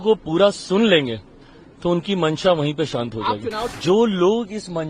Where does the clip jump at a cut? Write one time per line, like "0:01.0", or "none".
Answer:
0:03.7